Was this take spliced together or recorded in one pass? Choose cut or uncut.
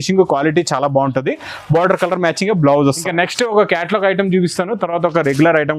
cut